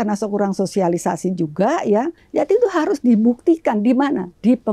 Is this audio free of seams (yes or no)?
no